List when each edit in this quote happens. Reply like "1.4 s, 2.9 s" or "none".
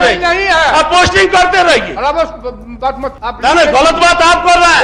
3.2 s